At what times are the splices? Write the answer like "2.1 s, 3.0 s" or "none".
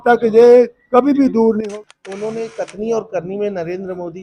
1.6 s